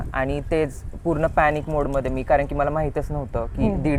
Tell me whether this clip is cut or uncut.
uncut